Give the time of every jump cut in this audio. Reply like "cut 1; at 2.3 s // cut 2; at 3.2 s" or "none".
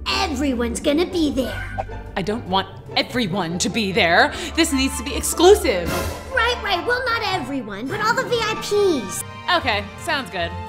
cut 1; at 9.3 s